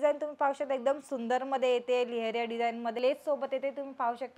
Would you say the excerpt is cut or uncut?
cut